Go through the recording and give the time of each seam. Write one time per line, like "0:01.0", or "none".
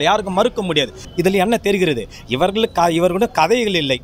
0:01.1